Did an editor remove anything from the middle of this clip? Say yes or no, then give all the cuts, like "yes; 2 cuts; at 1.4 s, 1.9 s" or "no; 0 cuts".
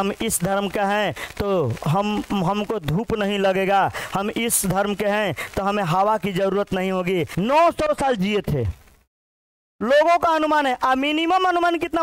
yes; 1 cut; at 7.3 s